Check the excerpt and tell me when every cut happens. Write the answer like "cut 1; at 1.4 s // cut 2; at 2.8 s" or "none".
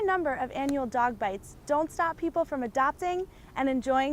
none